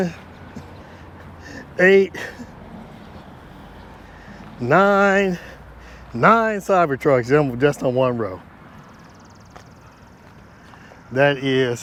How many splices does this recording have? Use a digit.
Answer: 0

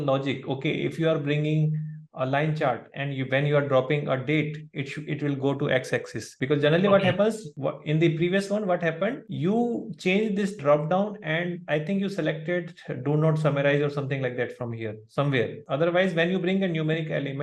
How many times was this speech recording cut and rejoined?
1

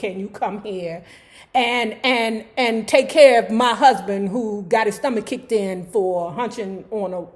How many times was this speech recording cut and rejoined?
0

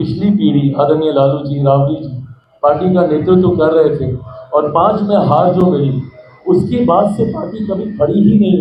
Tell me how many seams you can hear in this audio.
0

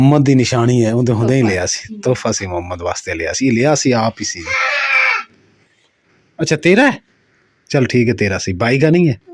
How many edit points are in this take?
0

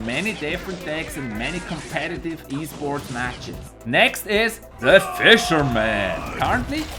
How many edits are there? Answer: 0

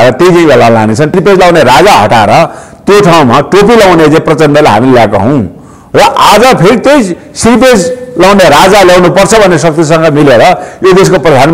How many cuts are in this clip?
1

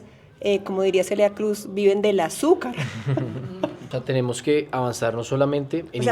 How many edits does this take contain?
1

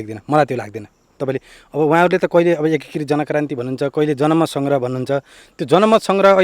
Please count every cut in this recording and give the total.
1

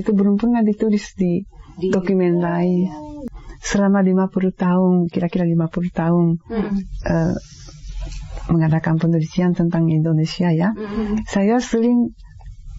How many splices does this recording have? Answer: 1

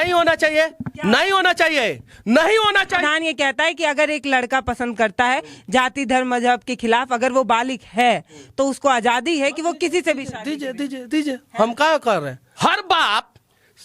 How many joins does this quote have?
2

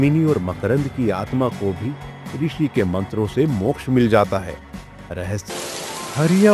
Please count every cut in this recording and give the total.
1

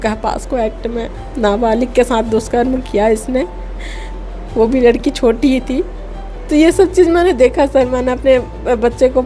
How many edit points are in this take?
0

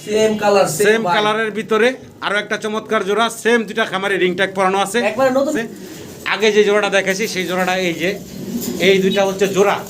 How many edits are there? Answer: 1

